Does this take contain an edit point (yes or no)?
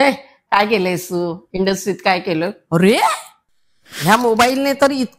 yes